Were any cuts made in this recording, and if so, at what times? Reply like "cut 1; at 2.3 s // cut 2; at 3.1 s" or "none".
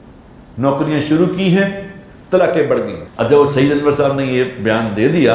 cut 1; at 3.0 s